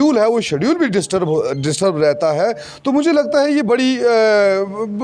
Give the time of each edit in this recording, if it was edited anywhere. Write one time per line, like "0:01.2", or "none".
none